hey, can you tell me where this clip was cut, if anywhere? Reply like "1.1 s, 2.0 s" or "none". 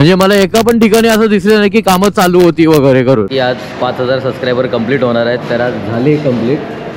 3.3 s